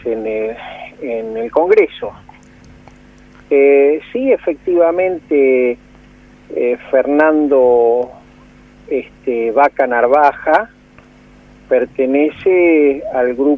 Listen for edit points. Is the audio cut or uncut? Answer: uncut